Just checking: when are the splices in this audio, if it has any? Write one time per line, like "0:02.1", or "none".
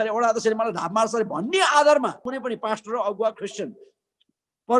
0:02.3